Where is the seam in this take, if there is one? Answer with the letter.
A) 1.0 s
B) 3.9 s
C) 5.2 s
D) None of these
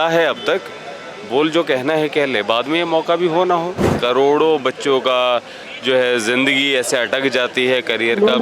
B